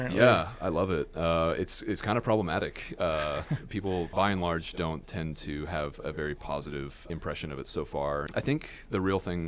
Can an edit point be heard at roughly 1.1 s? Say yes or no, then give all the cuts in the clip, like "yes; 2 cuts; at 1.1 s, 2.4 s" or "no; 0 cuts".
no; 3 cuts; at 4.1 s, 7.0 s, 8.3 s